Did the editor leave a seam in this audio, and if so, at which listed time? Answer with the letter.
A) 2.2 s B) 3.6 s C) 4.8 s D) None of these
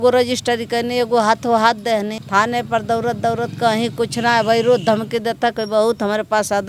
A